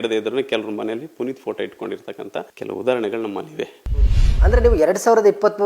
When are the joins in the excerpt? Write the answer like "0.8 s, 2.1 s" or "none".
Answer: 4.1 s